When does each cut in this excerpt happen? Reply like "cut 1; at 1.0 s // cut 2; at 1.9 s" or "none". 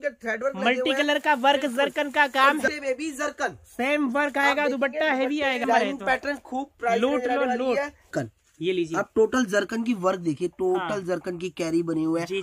cut 1; at 2.7 s // cut 2; at 5.6 s // cut 3; at 8.1 s